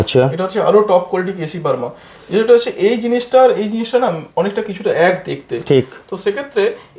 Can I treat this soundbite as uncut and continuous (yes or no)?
yes